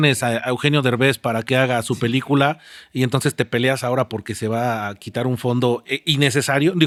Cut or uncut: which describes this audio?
uncut